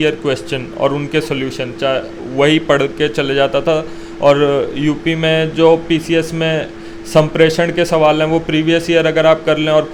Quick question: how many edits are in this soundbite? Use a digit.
0